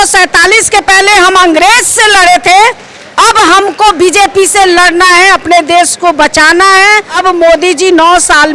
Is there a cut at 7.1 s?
yes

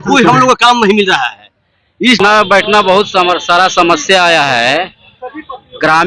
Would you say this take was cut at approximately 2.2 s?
yes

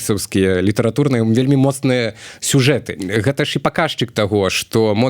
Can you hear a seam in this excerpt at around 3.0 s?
yes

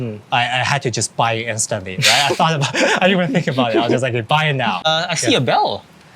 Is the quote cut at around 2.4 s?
no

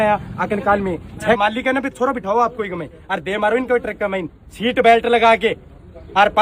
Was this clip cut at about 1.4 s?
yes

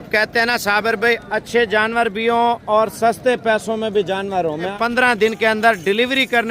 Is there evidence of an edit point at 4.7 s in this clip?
yes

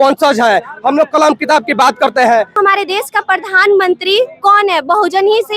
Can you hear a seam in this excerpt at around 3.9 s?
no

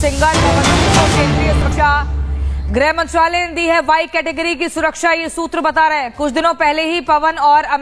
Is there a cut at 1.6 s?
yes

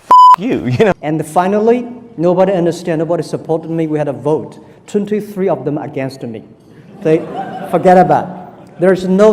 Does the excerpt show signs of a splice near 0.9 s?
yes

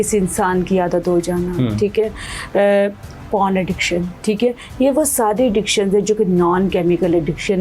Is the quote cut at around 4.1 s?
yes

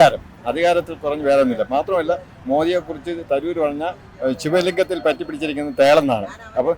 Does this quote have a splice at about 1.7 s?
no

